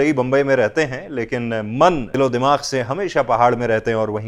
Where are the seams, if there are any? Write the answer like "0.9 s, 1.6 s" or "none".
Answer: 2.1 s